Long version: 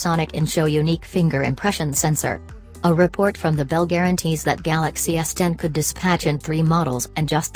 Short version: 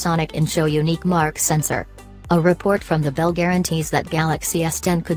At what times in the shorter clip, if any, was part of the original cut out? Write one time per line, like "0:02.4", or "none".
0:01.2